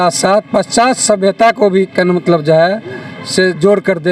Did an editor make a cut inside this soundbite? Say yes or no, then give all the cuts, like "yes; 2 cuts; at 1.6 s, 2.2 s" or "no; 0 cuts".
no; 0 cuts